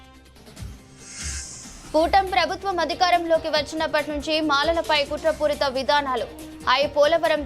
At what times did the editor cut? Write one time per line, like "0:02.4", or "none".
0:01.3